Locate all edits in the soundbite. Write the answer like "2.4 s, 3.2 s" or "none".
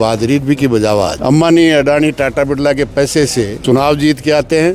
1.2 s, 3.6 s